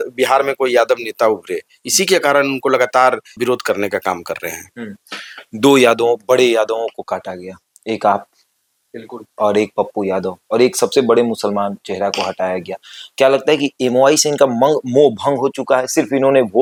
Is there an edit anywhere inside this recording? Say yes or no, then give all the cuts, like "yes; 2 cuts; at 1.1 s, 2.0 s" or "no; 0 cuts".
no; 0 cuts